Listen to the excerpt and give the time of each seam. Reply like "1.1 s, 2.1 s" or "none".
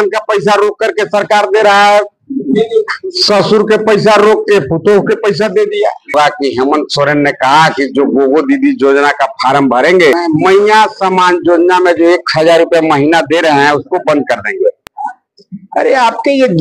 6.1 s, 10.1 s